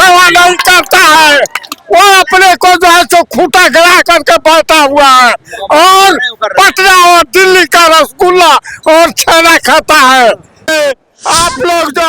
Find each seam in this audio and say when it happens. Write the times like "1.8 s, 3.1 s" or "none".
10.5 s